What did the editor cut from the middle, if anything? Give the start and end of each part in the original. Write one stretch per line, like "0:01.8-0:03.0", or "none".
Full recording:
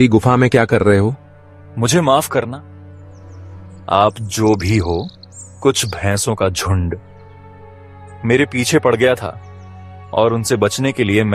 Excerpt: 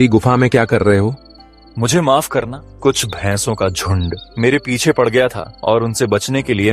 0:02.6-0:05.4
0:07.0-0:08.1
0:09.3-0:10.0